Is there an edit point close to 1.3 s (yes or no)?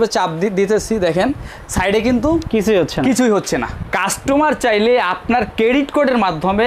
no